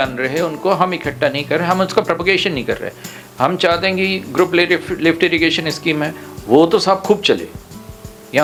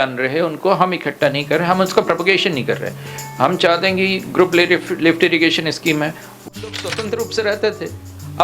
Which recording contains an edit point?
second; 1 cut; at 6.5 s

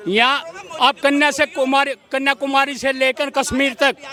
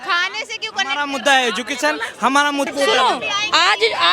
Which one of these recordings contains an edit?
second; 1 cut; at 2.7 s

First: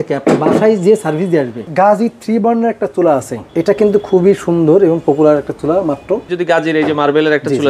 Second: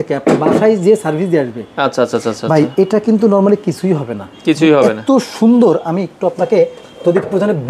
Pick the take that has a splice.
first; 3 cuts; at 1.7 s, 3.4 s, 6.3 s

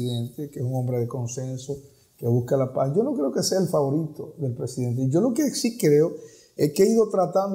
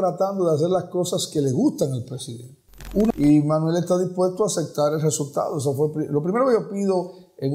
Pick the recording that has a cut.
second; 1 cut; at 3.1 s

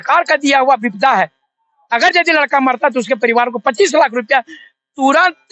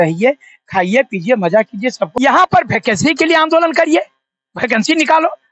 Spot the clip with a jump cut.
second; 1 cut; at 2.1 s

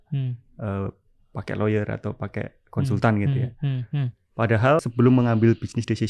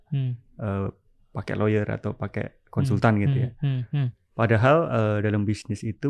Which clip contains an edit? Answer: first; 1 cut; at 4.8 s

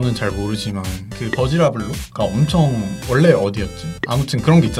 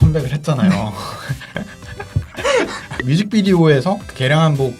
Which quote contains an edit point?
second; 1 cut; at 2.9 s

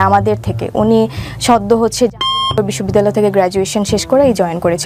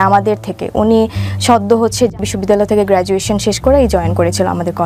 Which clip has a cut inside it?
second; 1 cut; at 2.3 s

